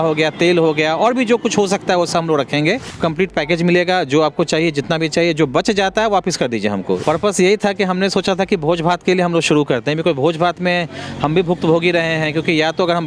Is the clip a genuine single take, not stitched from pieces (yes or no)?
no